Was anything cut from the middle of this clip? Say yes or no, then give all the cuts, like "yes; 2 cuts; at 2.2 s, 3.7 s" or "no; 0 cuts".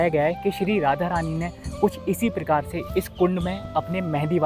no; 0 cuts